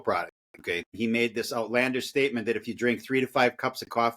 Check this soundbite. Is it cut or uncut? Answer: cut